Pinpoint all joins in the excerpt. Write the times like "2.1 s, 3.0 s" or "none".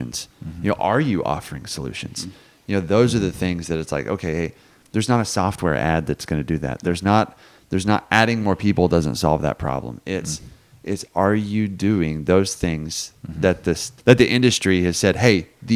13.9 s